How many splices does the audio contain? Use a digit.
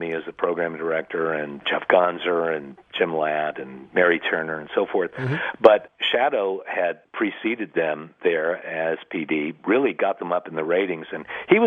3